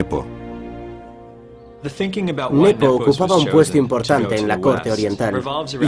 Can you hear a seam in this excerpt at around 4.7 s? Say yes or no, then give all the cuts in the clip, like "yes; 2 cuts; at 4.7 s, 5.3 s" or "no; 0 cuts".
no; 1 cut; at 2.3 s